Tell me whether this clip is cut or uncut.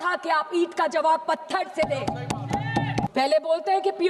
cut